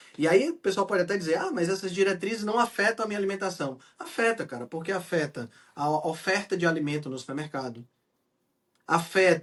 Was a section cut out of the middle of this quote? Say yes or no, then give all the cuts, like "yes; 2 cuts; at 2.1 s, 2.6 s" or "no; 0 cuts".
no; 0 cuts